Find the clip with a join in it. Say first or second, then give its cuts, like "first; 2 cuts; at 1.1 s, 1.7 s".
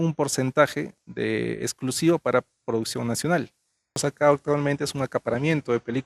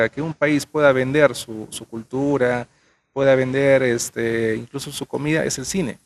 first; 1 cut; at 4.0 s